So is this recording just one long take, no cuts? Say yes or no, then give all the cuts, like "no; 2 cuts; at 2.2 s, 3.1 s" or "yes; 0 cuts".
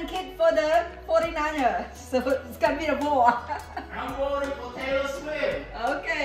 yes; 0 cuts